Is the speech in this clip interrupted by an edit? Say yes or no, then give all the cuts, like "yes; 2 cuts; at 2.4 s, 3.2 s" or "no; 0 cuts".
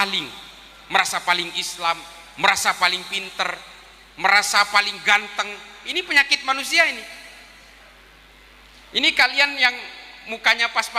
no; 0 cuts